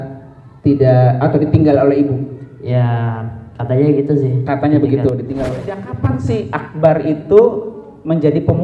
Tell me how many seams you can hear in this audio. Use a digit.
1